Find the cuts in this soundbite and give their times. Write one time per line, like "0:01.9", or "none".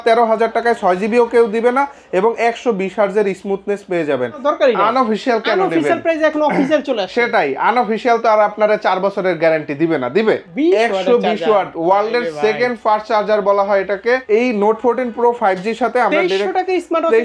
0:04.4
0:10.5
0:14.2